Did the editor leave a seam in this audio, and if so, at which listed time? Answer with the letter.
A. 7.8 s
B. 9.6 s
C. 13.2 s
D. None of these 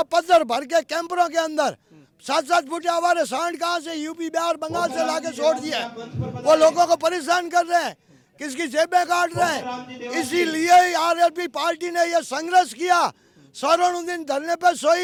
D